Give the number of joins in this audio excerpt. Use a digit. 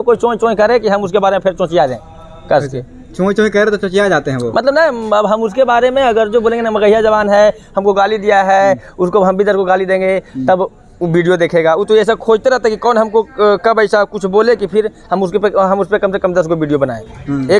0